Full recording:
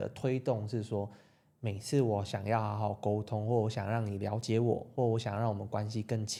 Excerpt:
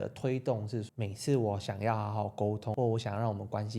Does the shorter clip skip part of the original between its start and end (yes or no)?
yes